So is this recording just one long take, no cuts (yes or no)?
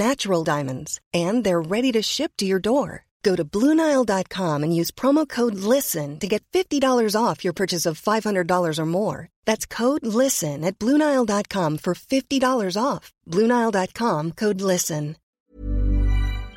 no